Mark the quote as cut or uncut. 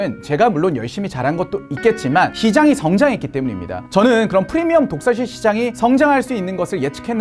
uncut